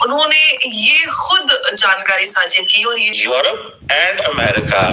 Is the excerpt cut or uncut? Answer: cut